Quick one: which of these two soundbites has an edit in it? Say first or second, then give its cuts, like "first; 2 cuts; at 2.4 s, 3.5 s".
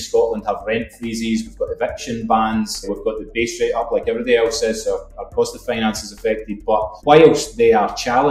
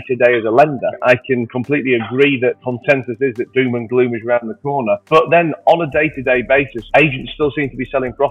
second; 2 cuts; at 1.0 s, 2.6 s